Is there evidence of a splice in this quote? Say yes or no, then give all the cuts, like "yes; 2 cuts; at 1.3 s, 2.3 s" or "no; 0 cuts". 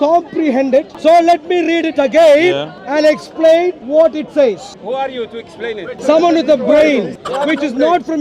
yes; 6 cuts; at 0.9 s, 2.7 s, 3.8 s, 4.7 s, 6.0 s, 7.2 s